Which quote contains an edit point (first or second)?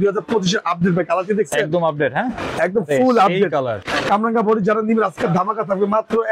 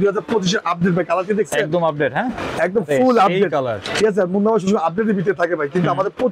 first